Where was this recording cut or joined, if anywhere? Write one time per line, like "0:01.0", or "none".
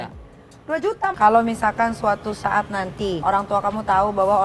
0:01.1
0:03.2

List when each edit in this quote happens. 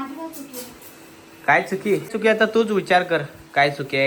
none

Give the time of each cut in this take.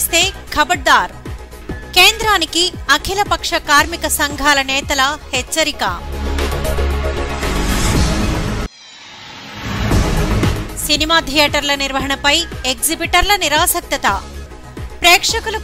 none

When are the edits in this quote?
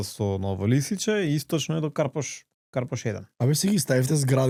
none

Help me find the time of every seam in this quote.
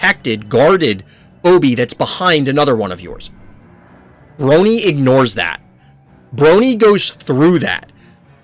none

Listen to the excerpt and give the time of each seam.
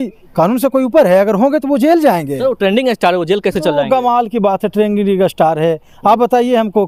none

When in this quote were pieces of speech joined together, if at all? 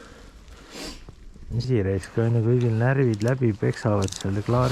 0:01.7

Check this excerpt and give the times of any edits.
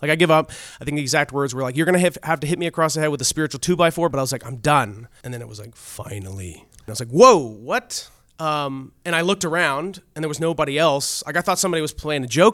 0:04.1
0:05.1
0:06.9

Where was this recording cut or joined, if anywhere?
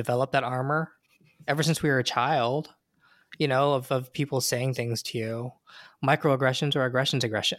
none

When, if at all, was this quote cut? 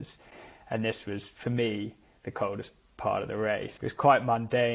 0:03.7

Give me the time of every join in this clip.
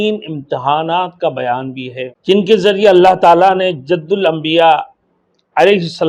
0:02.1

